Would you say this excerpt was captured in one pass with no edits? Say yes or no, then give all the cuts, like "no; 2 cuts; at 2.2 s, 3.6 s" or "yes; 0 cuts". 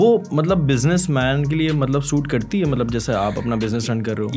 yes; 0 cuts